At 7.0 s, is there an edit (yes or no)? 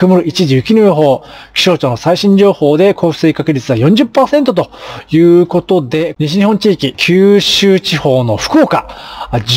yes